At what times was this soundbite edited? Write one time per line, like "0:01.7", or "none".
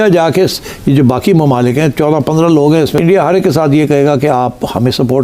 0:02.9